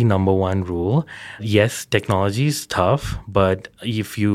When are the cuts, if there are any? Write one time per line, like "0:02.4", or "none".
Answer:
0:01.4